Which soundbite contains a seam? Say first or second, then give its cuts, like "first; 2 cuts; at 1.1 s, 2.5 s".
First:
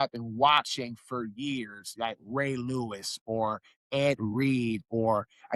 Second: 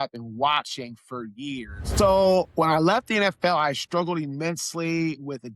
second; 1 cut; at 1.8 s